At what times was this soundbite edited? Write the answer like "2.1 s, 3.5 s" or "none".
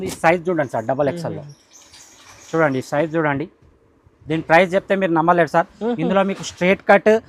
none